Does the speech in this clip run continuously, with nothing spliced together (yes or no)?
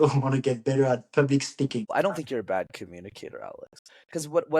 no